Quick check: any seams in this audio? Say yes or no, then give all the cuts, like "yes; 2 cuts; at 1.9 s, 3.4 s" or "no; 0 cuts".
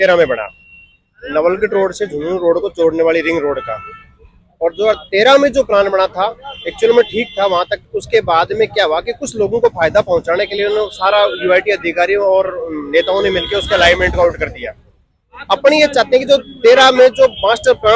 no; 0 cuts